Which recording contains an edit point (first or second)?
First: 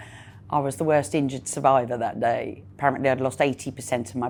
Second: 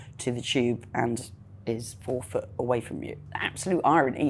second